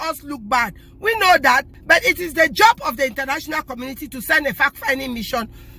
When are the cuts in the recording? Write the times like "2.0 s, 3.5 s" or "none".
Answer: 1.7 s